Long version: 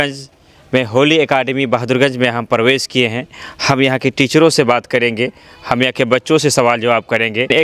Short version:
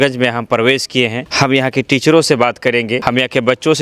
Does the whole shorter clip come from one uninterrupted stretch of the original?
no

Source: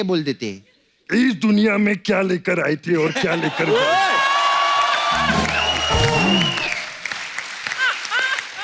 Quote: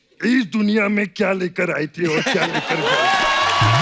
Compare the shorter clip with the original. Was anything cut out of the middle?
no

